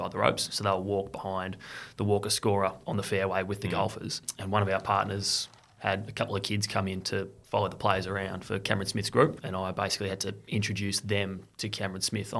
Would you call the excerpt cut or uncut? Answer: cut